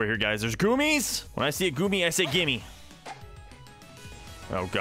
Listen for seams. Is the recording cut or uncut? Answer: cut